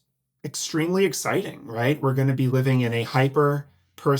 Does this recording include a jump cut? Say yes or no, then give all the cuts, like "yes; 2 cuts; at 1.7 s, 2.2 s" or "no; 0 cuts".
no; 0 cuts